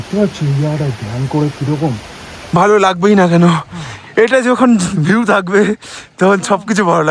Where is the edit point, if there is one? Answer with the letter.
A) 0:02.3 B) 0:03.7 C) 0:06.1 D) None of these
A